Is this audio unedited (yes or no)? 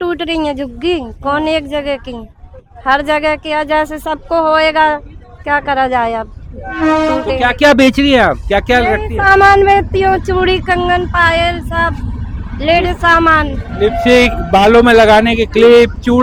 yes